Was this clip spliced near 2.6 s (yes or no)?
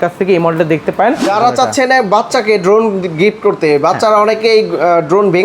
no